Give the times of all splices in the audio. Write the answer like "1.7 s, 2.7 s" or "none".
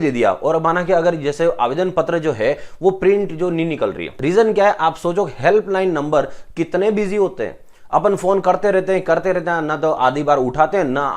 4.1 s